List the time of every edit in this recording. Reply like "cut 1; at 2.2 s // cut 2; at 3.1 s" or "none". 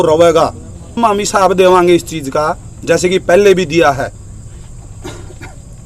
cut 1; at 1.0 s

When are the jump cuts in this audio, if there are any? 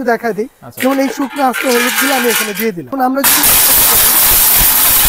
cut 1; at 2.9 s

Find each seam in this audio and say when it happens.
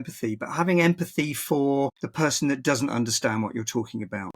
cut 1; at 2.0 s

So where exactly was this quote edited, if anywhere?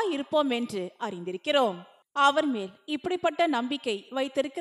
cut 1; at 1.9 s

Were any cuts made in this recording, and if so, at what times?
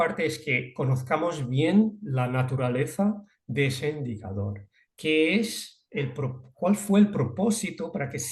none

